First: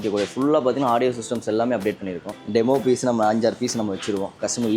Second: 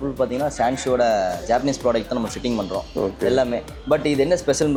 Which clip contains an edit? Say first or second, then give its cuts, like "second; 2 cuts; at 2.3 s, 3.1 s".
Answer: first; 1 cut; at 2.3 s